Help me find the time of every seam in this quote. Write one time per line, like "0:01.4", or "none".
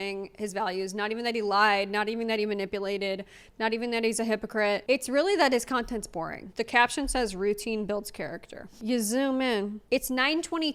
0:06.5
0:08.8
0:09.8